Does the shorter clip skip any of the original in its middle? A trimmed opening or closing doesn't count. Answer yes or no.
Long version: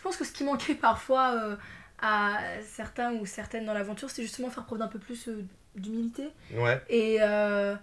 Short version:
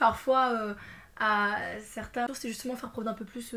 yes